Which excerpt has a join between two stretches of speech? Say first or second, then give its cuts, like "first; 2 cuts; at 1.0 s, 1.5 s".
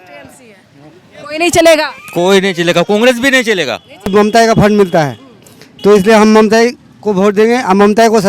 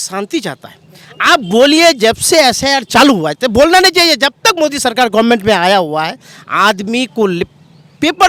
first; 1 cut; at 4.1 s